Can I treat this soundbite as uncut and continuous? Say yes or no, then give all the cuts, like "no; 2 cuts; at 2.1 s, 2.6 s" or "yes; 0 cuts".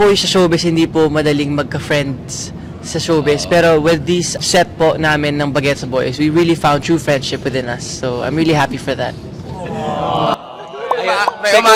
yes; 0 cuts